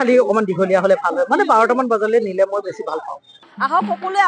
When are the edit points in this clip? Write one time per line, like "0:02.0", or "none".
0:03.3